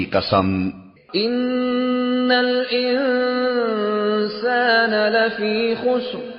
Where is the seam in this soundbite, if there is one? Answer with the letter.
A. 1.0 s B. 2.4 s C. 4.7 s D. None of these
A